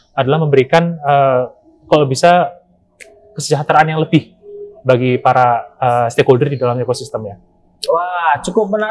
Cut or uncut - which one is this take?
uncut